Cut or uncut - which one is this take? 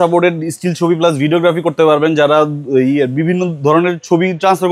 uncut